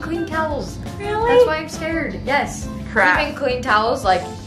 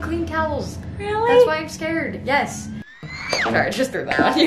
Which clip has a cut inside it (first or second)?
second